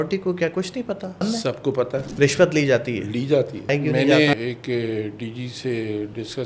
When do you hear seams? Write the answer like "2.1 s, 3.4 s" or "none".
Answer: 1.2 s, 2.1 s, 3.7 s, 4.3 s